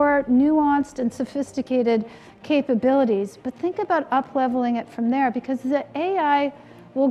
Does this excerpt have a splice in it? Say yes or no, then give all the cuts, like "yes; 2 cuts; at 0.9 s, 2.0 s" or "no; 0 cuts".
no; 0 cuts